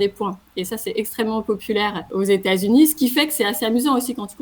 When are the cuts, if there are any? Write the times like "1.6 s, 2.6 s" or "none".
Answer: 2.0 s